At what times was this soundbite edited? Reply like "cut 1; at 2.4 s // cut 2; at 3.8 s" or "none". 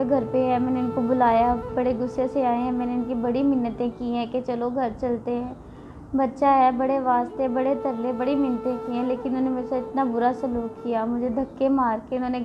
none